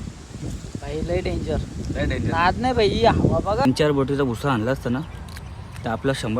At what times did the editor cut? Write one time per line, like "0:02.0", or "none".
0:03.6